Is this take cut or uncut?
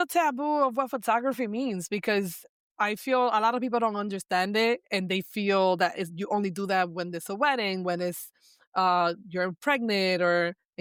uncut